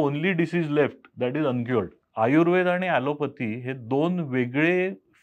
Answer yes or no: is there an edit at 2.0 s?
yes